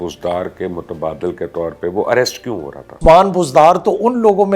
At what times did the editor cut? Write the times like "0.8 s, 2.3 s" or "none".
3.0 s